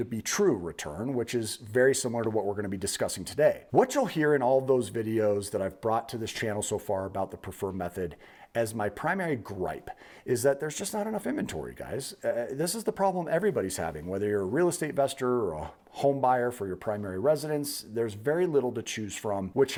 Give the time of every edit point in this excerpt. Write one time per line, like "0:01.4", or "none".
none